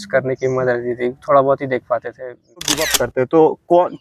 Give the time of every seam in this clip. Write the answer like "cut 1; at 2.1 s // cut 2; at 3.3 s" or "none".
cut 1; at 2.8 s

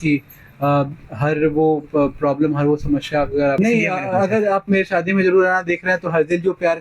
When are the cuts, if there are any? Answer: cut 1; at 3.6 s

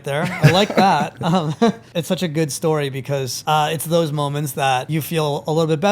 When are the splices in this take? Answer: cut 1; at 1.9 s // cut 2; at 3.3 s // cut 3; at 4.9 s

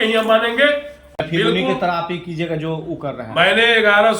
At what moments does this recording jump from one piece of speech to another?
cut 1; at 1.2 s

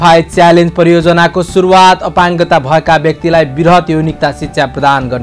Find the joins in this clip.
none

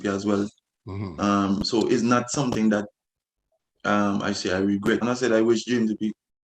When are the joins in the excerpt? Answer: cut 1; at 5.0 s

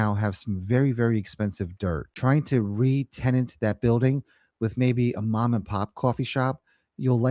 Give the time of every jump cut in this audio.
cut 1; at 2.1 s

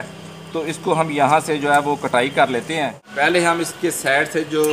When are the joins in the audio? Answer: cut 1; at 3.0 s

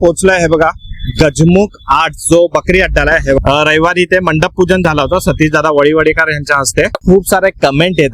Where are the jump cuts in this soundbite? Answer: cut 1; at 3.4 s // cut 2; at 7.0 s

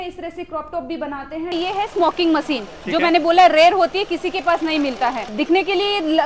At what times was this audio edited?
cut 1; at 1.5 s // cut 2; at 5.3 s

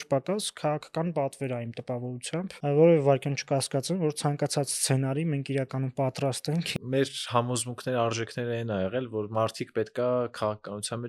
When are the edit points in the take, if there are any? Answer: cut 1; at 2.5 s // cut 2; at 6.7 s

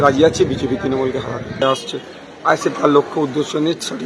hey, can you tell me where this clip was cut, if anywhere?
cut 1; at 1.6 s

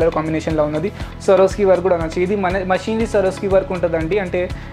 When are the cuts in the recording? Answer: cut 1; at 1.0 s

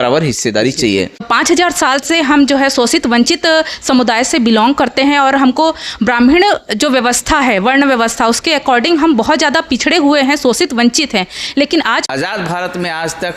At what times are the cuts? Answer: cut 1; at 1.3 s // cut 2; at 12.0 s

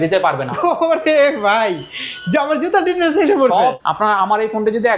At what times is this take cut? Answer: cut 1; at 3.8 s

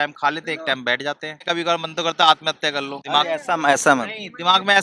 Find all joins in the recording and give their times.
cut 1; at 1.4 s // cut 2; at 2.9 s

